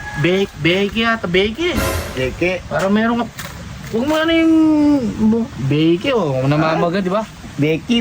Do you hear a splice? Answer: no; 0 cuts

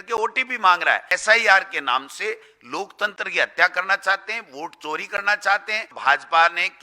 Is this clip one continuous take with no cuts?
no; 2 cuts; at 1.1 s, 5.9 s

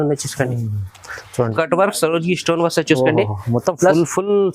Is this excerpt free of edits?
no; 1 cut; at 1.5 s

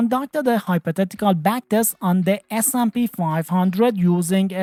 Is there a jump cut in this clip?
no; 0 cuts

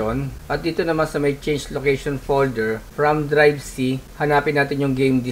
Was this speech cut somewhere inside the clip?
no; 0 cuts

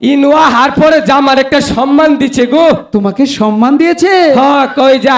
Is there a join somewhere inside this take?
no; 0 cuts

